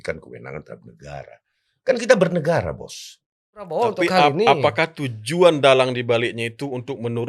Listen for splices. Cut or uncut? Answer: cut